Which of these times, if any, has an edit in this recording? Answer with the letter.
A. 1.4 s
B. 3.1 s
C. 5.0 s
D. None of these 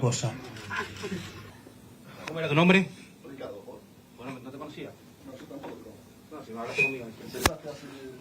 A